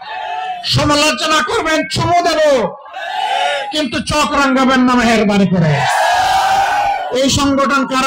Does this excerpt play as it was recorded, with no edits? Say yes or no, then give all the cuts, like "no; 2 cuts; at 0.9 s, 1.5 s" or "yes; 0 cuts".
yes; 0 cuts